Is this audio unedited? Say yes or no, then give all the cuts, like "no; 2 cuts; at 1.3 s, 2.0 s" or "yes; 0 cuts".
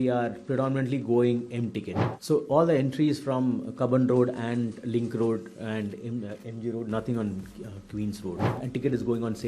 no; 2 cuts; at 1.8 s, 8.6 s